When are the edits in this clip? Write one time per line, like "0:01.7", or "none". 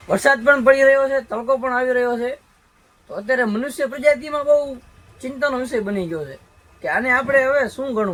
none